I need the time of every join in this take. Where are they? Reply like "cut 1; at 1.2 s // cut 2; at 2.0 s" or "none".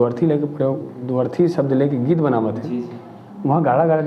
none